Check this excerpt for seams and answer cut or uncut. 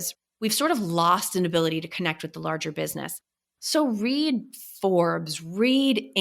cut